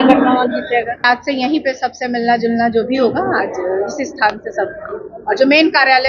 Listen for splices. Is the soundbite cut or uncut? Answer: cut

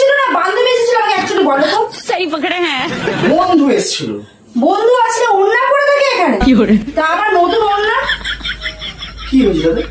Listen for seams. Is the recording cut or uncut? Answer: uncut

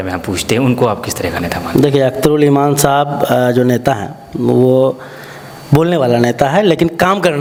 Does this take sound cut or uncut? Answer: uncut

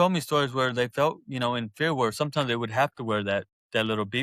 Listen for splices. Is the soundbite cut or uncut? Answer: uncut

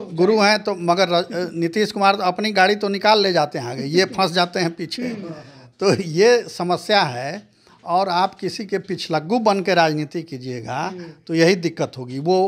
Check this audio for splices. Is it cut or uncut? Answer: uncut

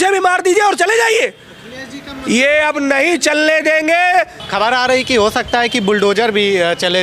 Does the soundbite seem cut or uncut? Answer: uncut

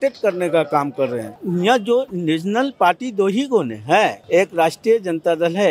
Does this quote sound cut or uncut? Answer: cut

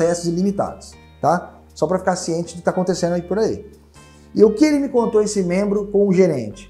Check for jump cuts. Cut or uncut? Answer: uncut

